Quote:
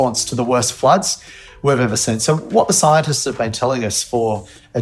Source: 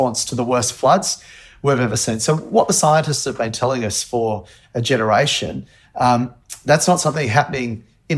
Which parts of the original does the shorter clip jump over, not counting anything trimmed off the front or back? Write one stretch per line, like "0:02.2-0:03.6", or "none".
none